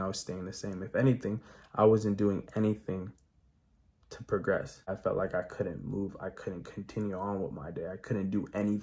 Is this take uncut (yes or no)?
no